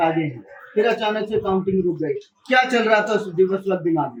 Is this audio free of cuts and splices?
yes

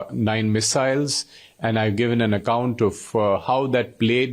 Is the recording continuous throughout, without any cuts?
yes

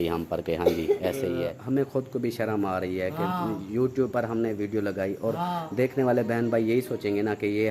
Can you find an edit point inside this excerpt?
yes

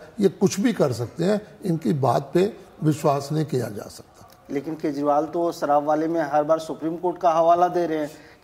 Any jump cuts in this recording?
no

